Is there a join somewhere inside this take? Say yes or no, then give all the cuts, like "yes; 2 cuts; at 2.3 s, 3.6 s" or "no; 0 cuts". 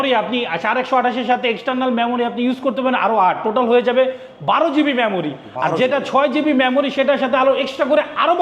no; 0 cuts